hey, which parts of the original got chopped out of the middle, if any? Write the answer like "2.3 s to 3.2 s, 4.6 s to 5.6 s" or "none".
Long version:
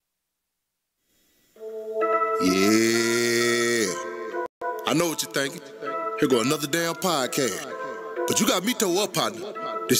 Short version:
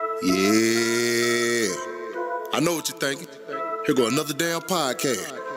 4.5 s to 4.6 s